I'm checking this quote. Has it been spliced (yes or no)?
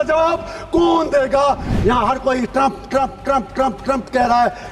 yes